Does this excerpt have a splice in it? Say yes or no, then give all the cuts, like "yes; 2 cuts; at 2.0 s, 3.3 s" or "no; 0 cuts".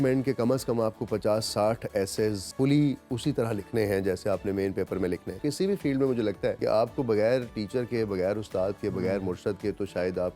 yes; 3 cuts; at 2.4 s, 5.3 s, 6.6 s